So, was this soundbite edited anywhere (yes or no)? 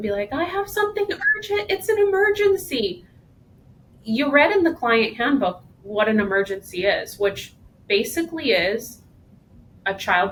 no